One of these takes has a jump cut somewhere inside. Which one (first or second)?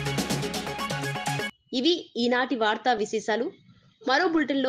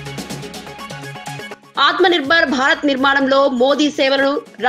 second